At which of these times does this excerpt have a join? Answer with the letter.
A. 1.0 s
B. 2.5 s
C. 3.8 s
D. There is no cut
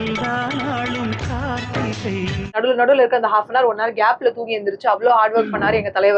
B